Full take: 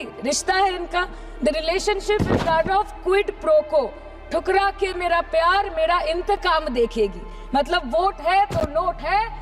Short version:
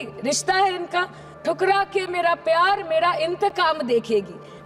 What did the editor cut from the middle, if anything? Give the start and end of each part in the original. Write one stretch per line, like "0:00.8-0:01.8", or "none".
0:01.2-0:04.1